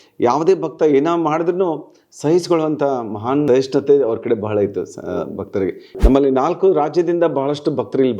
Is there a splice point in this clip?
yes; 2 cuts; at 3.5 s, 5.8 s

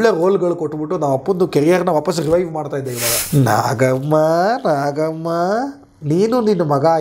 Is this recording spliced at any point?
yes; 1 cut; at 3.1 s

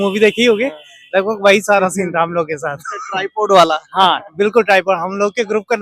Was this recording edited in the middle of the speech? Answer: no; 0 cuts

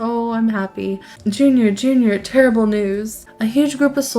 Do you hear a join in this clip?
yes; 2 cuts; at 1.1 s, 3.2 s

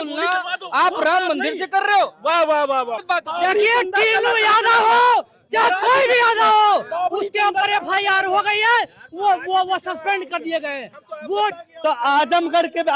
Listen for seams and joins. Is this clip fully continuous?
no; 2 cuts; at 3.0 s, 11.6 s

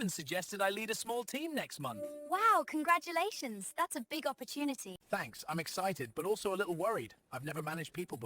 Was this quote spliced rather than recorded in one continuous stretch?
yes; 1 cut; at 4.9 s

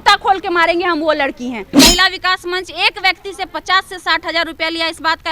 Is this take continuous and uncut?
no; 1 cut; at 1.6 s

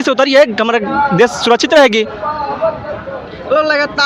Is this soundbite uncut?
yes; 0 cuts

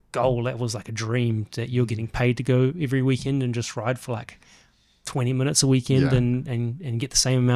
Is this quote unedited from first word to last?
yes; 0 cuts

